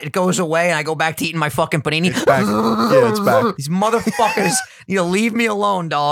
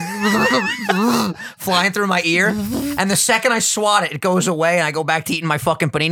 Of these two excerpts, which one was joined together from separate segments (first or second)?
first